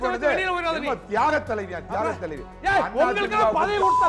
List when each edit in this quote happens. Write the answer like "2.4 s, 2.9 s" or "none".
none